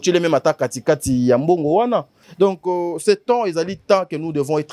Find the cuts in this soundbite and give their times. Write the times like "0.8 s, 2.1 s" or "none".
2.2 s